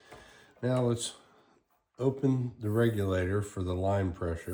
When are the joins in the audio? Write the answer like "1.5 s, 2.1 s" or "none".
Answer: none